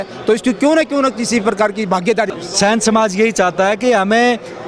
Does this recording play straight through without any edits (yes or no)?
no